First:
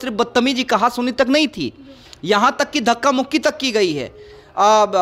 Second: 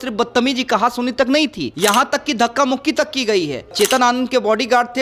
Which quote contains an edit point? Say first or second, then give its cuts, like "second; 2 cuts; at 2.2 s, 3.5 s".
second; 2 cuts; at 1.6 s, 3.7 s